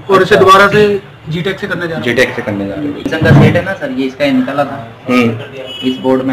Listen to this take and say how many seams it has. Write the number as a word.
one